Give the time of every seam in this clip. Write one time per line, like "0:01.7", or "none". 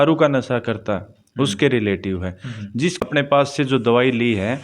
0:03.0